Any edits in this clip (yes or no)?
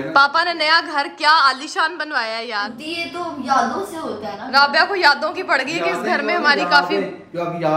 no